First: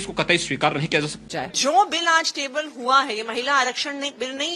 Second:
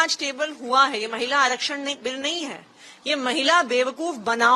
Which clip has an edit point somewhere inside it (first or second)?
first